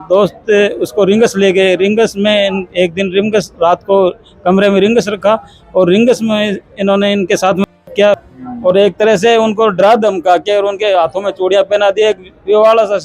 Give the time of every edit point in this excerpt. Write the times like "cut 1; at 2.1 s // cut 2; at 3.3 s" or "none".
cut 1; at 8.2 s